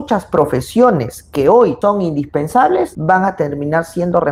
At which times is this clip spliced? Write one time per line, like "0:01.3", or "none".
none